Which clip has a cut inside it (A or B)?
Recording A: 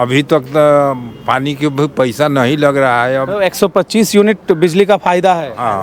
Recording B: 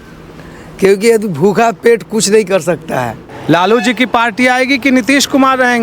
B